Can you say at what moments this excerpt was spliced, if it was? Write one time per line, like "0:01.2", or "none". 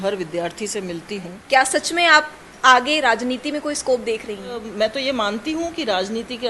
0:01.4
0:04.7